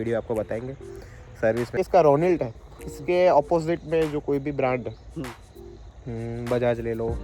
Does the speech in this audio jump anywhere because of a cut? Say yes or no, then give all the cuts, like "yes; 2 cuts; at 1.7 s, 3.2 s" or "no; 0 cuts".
yes; 1 cut; at 1.8 s